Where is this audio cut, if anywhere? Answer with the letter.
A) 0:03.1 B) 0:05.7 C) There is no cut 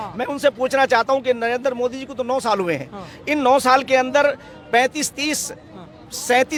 C